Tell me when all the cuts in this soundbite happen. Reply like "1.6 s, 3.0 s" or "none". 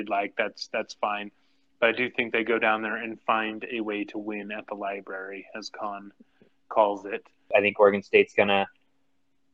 7.5 s